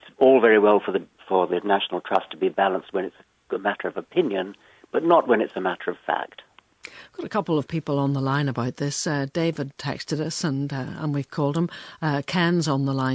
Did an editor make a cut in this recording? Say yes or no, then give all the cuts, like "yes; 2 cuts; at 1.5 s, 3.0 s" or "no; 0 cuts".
no; 0 cuts